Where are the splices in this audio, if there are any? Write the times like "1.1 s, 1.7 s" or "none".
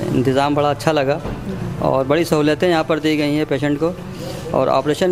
none